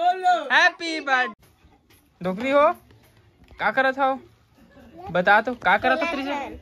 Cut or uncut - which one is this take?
cut